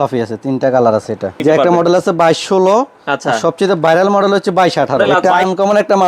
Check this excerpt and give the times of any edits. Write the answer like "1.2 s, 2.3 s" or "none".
1.4 s, 5.0 s